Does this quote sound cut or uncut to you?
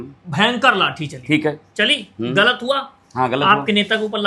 uncut